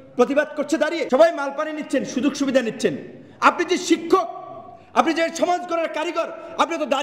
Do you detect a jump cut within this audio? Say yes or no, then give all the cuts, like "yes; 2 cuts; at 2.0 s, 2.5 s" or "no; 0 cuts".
yes; 1 cut; at 1.0 s